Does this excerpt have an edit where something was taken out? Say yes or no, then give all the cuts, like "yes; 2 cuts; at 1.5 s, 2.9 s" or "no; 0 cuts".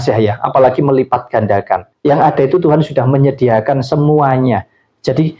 yes; 1 cut; at 1.9 s